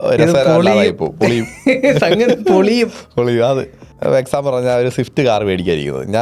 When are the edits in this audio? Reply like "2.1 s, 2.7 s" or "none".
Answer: 3.8 s